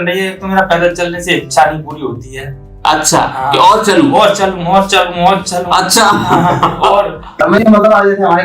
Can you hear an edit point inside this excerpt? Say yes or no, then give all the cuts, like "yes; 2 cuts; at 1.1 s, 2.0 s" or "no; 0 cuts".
yes; 1 cut; at 7.4 s